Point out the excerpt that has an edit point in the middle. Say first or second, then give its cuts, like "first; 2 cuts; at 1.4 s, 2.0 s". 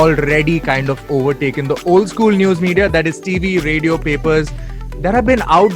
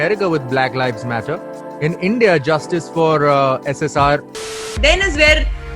second; 1 cut; at 4.4 s